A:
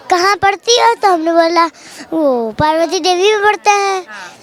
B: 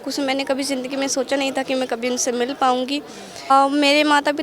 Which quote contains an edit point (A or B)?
B